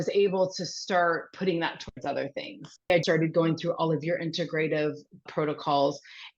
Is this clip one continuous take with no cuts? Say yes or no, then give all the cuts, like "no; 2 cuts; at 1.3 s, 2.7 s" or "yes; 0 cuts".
no; 1 cut; at 3.0 s